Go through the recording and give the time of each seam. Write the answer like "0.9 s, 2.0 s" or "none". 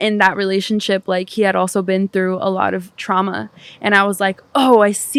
none